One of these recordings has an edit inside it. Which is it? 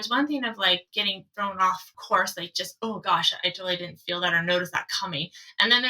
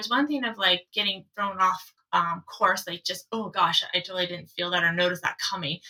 first; 1 cut; at 2.0 s

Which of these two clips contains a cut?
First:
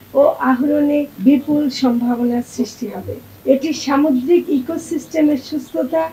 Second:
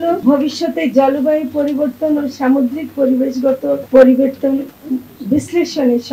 first; 1 cut; at 3.2 s

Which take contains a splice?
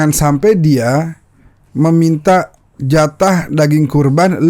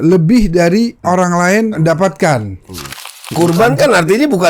second; 3 cuts; at 1.0 s, 1.8 s, 3.2 s

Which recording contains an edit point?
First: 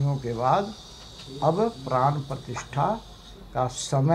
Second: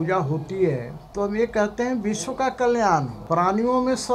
second; 2 cuts; at 1.0 s, 3.1 s

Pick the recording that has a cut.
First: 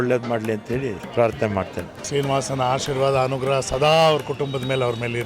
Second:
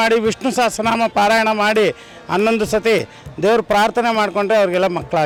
first; 2 cuts; at 1.0 s, 2.1 s

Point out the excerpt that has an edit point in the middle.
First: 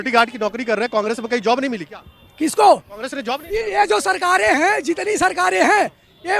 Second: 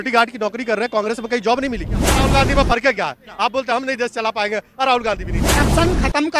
second; 2 cuts; at 2.3 s, 5.6 s

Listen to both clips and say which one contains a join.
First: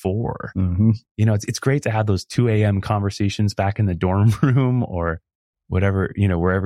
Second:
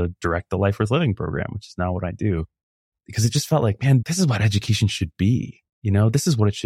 second; 2 cuts; at 2.9 s, 4.0 s

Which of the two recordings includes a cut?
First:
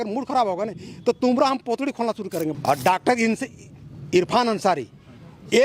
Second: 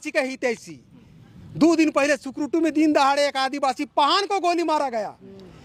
first; 1 cut; at 2.6 s

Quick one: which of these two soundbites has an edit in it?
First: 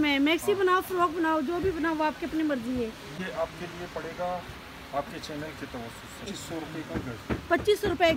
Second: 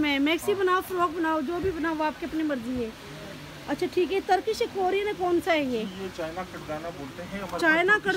first; 2 cuts; at 3.2 s, 6.3 s

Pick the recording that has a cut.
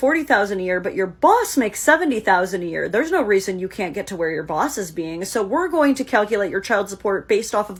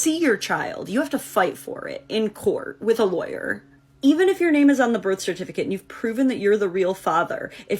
second; 1 cut; at 4.8 s

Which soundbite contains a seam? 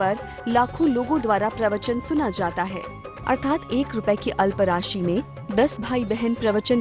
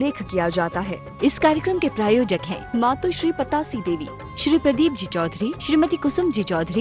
second; 1 cut; at 1.0 s

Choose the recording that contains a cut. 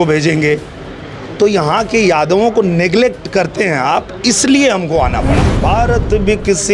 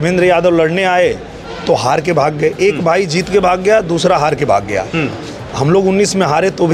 first; 1 cut; at 5.5 s

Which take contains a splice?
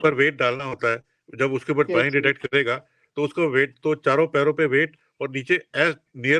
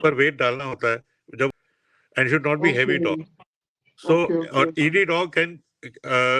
second; 1 cut; at 1.5 s

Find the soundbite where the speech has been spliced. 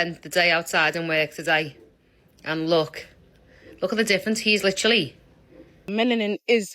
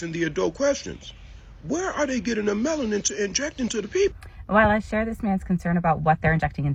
first; 1 cut; at 5.8 s

